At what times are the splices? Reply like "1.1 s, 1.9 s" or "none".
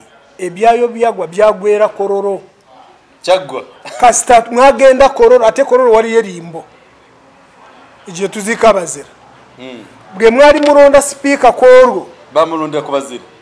none